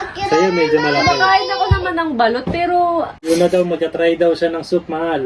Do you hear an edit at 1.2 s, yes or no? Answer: no